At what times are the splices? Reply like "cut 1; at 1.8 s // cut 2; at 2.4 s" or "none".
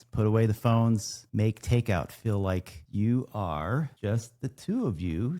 cut 1; at 1.2 s // cut 2; at 2.8 s // cut 3; at 3.9 s